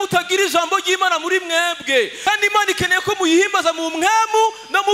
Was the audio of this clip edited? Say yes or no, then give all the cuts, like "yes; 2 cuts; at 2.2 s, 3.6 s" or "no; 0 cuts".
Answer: yes; 1 cut; at 2.1 s